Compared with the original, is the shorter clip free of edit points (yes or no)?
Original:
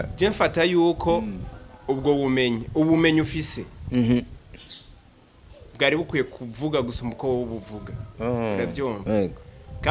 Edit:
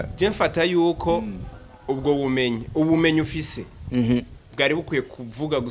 no